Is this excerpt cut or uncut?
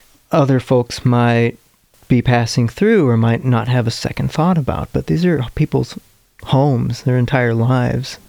uncut